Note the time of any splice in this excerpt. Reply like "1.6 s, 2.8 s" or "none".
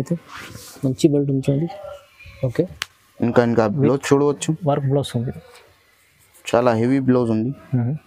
none